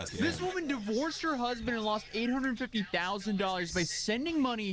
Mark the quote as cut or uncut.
cut